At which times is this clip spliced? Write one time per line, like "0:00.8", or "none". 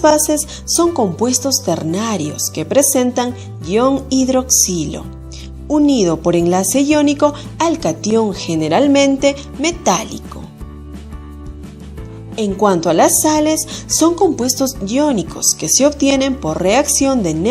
0:16.1